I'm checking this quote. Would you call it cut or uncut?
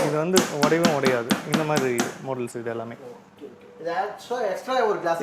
uncut